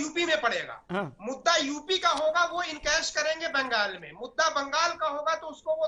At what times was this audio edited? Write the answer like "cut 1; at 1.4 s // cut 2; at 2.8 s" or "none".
none

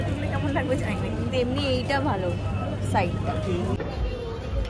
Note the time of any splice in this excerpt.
none

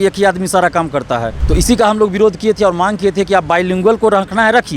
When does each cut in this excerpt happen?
cut 1; at 1.3 s

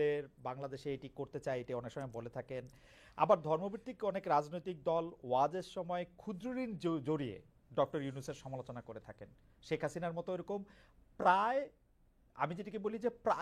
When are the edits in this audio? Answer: cut 1; at 9.1 s

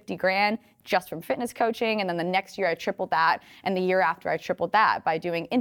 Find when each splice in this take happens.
none

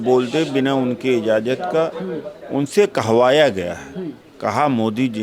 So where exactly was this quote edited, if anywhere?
none

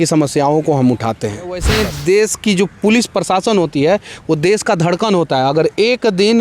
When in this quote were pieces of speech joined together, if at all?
cut 1; at 1.7 s

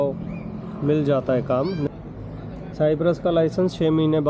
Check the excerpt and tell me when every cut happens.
cut 1; at 1.9 s

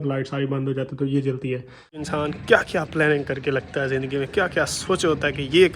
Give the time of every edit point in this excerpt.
cut 1; at 2.1 s

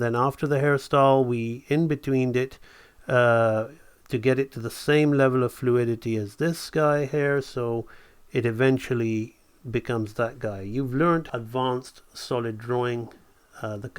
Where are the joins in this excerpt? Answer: cut 1; at 11.3 s

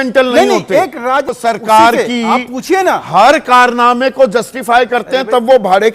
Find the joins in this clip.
cut 1; at 1.3 s

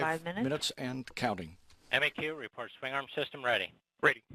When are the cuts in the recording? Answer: cut 1; at 3.3 s

